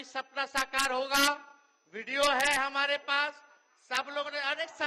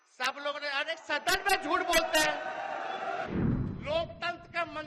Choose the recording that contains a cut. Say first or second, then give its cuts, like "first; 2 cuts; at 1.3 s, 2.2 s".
second; 1 cut; at 3.3 s